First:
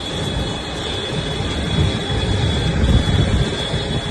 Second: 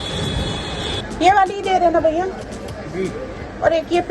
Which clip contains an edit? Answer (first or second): second